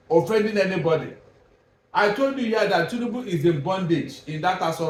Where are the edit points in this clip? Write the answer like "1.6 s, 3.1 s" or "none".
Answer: none